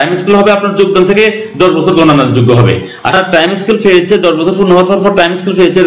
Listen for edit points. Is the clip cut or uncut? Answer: cut